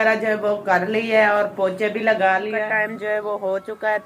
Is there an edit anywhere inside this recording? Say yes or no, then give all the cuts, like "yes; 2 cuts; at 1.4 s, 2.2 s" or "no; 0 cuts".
yes; 1 cut; at 2.5 s